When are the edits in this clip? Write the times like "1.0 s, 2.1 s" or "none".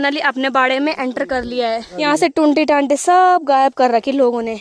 1.9 s